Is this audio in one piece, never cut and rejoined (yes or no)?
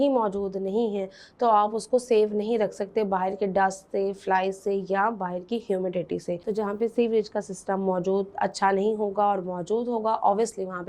no